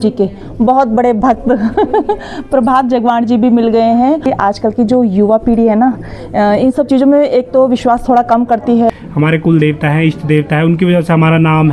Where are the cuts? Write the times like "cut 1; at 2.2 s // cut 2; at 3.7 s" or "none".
cut 1; at 4.3 s // cut 2; at 8.9 s